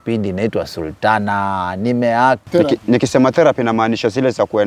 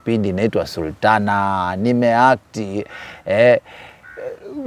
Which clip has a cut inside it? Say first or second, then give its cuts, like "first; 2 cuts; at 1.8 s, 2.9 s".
first; 1 cut; at 2.4 s